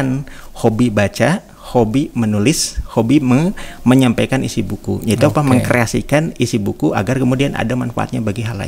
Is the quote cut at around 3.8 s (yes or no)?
no